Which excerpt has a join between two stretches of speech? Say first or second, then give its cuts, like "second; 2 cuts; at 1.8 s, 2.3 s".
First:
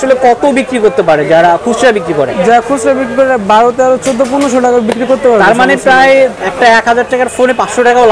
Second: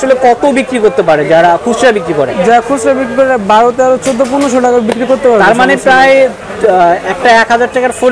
first; 1 cut; at 6.4 s